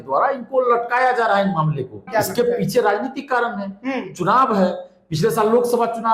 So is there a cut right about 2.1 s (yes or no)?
yes